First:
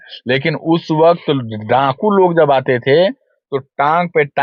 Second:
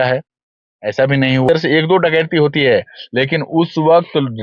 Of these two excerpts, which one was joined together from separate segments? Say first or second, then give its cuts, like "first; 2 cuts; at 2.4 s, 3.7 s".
second; 1 cut; at 1.5 s